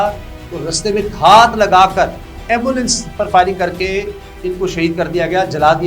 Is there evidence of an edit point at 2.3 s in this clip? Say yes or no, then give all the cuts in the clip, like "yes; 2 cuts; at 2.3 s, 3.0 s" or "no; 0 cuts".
yes; 1 cut; at 2.3 s